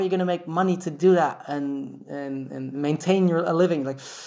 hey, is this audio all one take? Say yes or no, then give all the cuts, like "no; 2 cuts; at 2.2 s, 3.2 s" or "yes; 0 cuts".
yes; 0 cuts